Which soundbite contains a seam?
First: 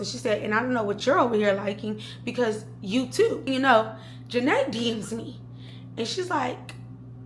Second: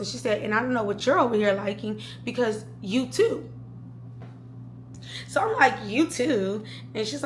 first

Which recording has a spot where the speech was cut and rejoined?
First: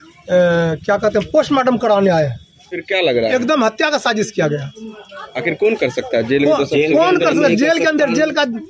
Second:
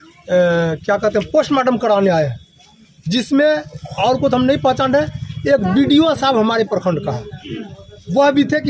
first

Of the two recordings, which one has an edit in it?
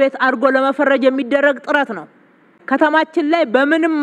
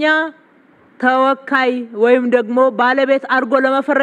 first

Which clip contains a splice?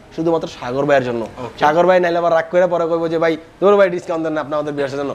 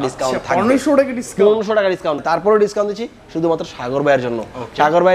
second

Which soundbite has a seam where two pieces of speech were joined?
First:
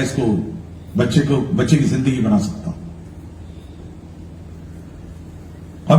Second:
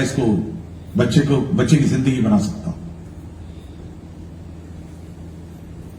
first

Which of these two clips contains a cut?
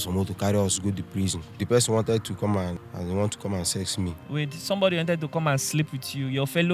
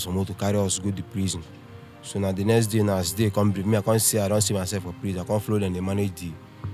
first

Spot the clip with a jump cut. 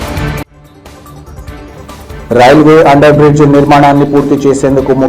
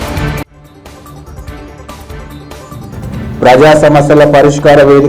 first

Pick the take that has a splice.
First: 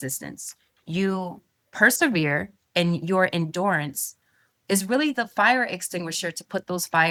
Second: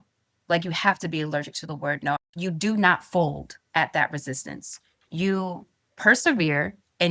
second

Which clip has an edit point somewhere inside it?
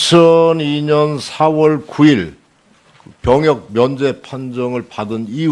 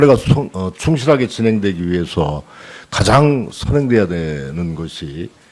second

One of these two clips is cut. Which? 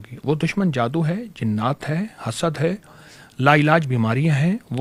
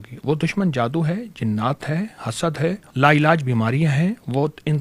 second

